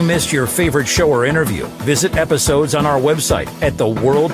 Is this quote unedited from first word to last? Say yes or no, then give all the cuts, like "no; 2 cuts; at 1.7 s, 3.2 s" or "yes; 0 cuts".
yes; 0 cuts